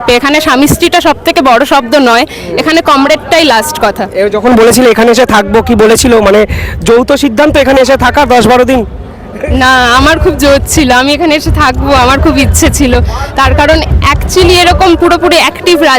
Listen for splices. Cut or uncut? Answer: uncut